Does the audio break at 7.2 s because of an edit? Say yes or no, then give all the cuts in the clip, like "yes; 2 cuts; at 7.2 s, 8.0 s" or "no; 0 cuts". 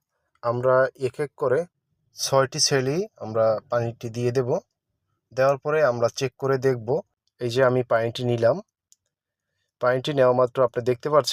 yes; 1 cut; at 7.2 s